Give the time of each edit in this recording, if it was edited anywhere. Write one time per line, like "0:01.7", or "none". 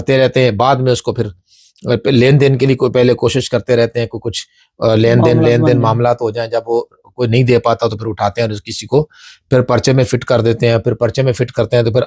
none